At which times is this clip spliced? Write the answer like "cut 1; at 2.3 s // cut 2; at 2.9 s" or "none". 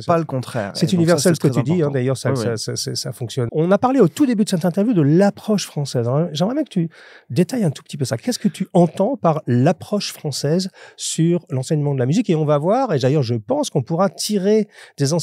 cut 1; at 3.4 s

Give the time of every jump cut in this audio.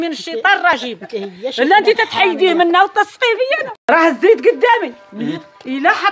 cut 1; at 3.7 s

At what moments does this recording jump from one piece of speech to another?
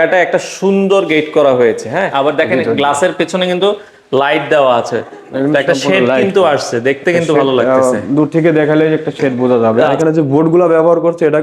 cut 1; at 2.1 s // cut 2; at 9.9 s

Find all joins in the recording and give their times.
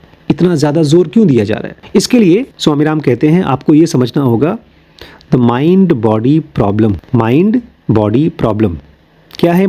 cut 1; at 1.7 s // cut 2; at 7.0 s

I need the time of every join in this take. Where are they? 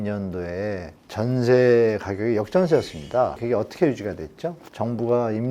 cut 1; at 1.0 s // cut 2; at 3.4 s

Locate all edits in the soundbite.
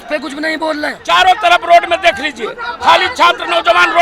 cut 1; at 0.9 s

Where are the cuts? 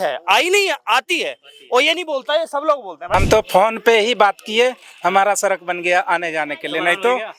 cut 1; at 3.1 s

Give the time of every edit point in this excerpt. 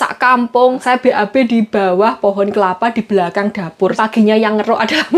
cut 1; at 0.8 s // cut 2; at 4.0 s

